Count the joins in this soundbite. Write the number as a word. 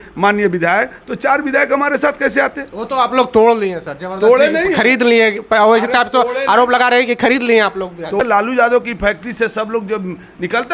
one